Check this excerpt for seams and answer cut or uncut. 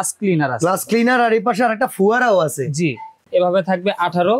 cut